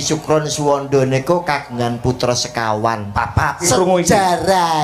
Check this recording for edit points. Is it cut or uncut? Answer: cut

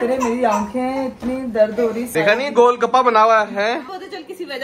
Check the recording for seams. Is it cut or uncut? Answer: cut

